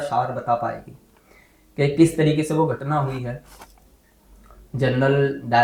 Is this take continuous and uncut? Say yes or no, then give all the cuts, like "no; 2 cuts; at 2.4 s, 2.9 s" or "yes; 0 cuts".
yes; 0 cuts